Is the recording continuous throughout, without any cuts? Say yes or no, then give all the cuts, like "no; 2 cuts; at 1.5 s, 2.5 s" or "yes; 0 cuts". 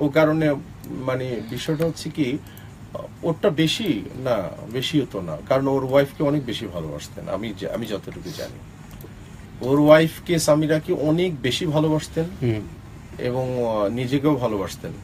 yes; 0 cuts